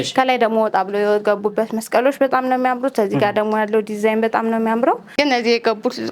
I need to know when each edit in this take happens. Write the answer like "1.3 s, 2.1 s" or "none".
5.1 s